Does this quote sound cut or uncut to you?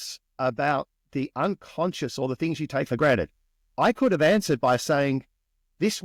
uncut